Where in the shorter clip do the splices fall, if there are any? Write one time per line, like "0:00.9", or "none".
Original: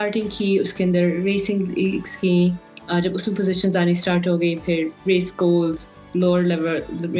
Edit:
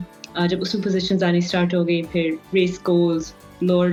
none